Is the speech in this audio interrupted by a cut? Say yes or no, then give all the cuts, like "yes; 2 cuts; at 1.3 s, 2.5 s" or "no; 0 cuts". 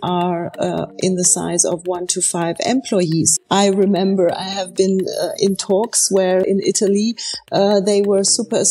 yes; 2 cuts; at 3.4 s, 6.4 s